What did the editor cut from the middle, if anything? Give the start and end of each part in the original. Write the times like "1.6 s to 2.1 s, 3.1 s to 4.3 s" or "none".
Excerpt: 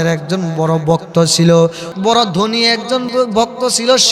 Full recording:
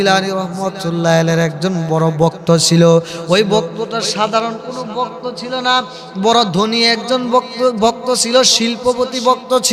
3.1 s to 6.0 s, 7.3 s to 7.5 s